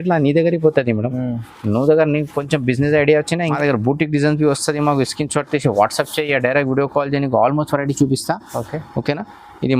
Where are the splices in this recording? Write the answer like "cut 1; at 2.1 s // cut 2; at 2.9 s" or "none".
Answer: cut 1; at 3.6 s